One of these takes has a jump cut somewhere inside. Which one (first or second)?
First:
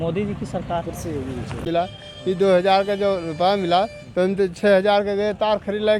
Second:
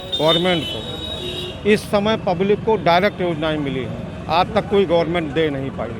first